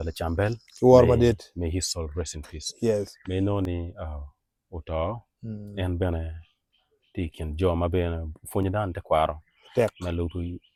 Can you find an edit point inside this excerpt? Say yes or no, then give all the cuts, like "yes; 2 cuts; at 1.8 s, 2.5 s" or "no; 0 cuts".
no; 0 cuts